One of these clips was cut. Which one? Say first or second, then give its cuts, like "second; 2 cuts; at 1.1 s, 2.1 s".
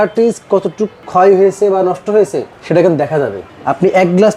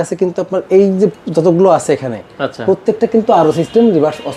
first; 2 cuts; at 1.0 s, 3.5 s